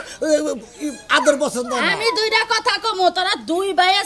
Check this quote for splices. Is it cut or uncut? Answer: uncut